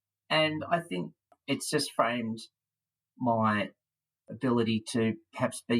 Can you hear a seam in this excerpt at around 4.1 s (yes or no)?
no